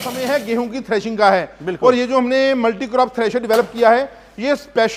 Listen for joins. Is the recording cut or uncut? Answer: uncut